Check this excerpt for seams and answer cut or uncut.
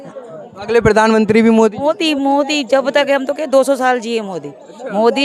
uncut